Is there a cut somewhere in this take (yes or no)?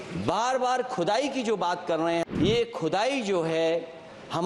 yes